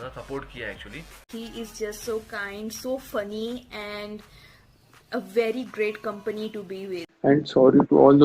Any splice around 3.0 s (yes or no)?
no